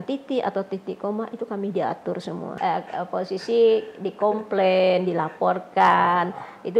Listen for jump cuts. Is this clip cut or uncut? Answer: cut